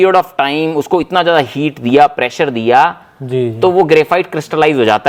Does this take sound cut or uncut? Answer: uncut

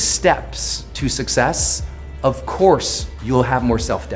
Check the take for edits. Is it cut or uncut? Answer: uncut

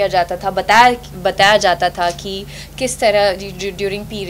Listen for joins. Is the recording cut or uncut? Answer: uncut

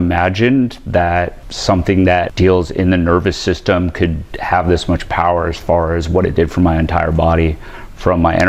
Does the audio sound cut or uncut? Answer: cut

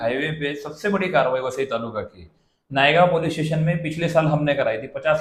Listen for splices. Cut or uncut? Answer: uncut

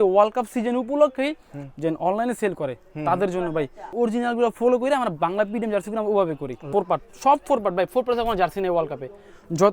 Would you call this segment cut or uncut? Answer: cut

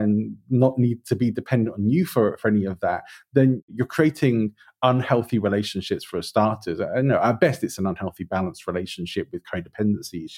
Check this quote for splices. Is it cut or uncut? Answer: cut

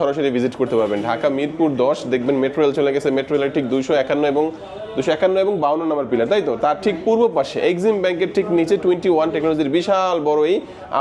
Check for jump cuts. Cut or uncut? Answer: uncut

